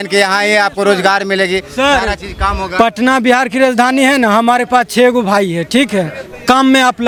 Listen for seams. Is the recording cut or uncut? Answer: uncut